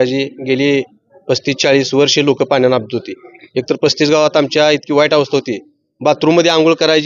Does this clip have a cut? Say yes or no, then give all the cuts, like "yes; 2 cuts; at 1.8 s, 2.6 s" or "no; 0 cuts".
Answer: no; 0 cuts